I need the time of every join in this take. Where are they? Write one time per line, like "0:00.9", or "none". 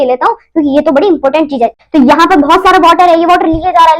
0:01.8